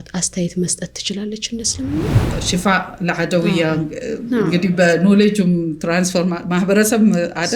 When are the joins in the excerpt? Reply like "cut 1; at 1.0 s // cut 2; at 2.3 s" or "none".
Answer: cut 1; at 2.4 s